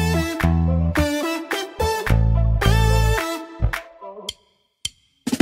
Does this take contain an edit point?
no; 0 cuts

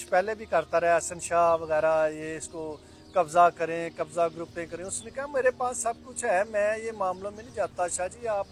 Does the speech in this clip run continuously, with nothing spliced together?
yes; 0 cuts

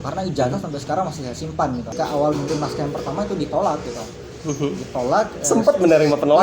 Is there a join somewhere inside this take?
yes; 1 cut; at 1.9 s

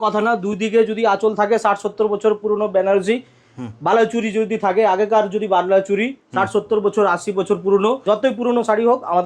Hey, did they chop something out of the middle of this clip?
yes; 1 cut; at 8.0 s

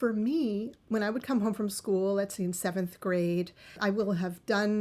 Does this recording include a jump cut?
no; 0 cuts

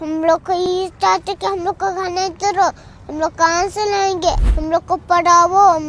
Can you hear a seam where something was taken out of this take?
yes; 1 cut; at 4.5 s

